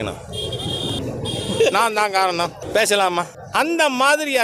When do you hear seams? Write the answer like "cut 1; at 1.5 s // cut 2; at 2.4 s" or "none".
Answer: cut 1; at 1.0 s // cut 2; at 2.6 s // cut 3; at 3.4 s